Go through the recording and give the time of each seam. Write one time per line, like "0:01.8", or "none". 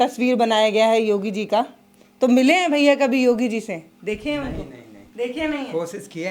none